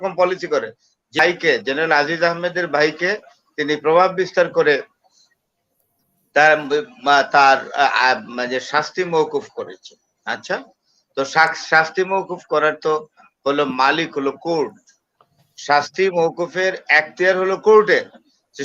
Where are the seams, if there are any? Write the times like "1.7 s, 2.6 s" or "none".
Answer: 1.2 s

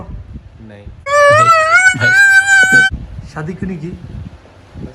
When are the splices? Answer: none

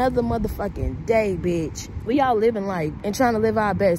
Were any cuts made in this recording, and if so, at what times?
2.0 s, 2.9 s

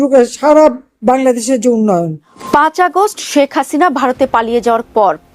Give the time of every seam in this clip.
2.3 s

